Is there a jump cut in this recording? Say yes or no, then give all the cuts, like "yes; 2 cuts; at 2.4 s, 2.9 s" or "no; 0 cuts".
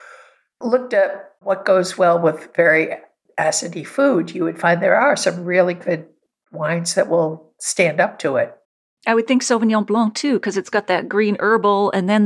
no; 0 cuts